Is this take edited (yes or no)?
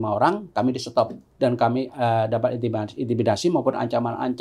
yes